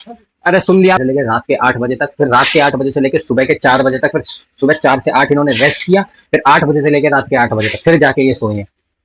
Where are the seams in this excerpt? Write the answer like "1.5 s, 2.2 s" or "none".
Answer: 1.0 s